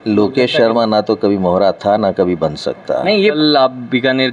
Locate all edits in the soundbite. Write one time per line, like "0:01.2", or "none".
0:03.3